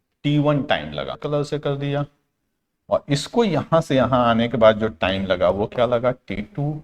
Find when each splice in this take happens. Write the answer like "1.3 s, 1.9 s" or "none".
1.2 s